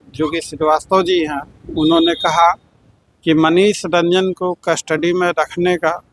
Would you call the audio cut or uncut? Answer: uncut